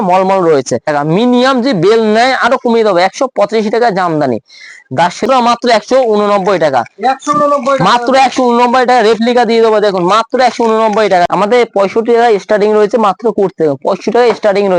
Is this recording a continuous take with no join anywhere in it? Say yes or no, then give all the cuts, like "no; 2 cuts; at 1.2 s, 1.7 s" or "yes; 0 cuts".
no; 3 cuts; at 0.9 s, 5.2 s, 11.3 s